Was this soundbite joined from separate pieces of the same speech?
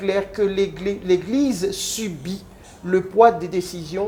no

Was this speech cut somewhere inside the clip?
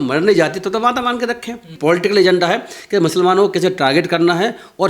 yes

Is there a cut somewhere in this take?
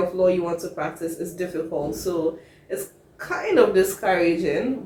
no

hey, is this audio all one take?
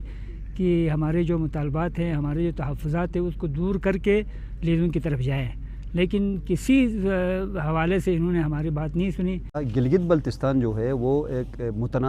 no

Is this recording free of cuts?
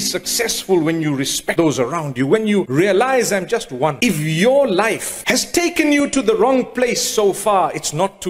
no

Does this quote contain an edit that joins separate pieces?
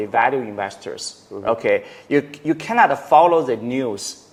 no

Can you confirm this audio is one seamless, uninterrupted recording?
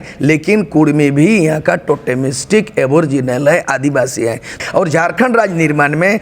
no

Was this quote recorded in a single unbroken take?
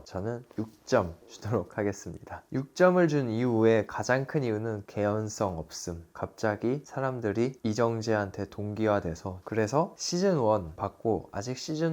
no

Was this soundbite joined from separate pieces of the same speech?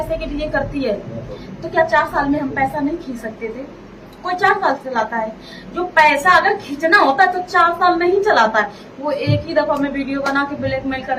no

